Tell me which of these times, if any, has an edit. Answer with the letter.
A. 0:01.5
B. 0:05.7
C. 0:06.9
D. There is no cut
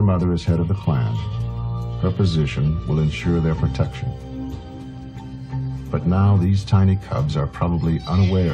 D